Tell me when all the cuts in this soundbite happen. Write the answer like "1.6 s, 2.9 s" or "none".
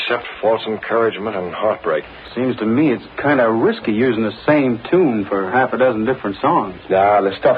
2.1 s